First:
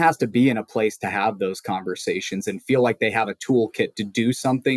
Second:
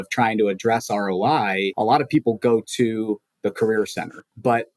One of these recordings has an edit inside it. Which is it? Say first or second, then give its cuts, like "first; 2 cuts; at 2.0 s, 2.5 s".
second; 1 cut; at 1.7 s